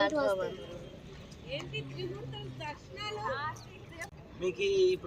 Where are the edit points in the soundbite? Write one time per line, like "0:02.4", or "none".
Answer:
0:04.1